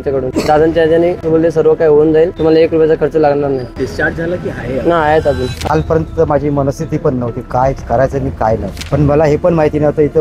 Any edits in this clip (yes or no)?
yes